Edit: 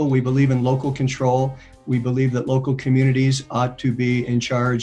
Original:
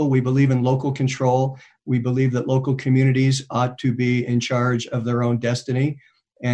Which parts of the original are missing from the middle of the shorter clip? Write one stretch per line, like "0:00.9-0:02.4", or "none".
none